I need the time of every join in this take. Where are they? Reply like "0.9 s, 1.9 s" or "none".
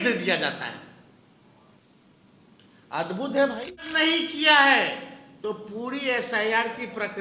3.9 s